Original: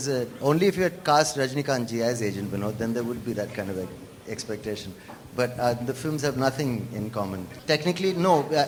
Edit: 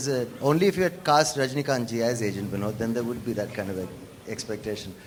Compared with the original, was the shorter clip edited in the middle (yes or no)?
no